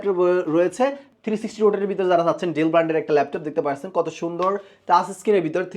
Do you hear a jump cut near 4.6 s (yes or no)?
no